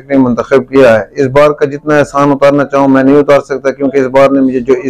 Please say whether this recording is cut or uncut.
uncut